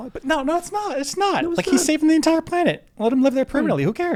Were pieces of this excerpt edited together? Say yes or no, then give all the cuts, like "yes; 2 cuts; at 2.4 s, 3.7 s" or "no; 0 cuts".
no; 0 cuts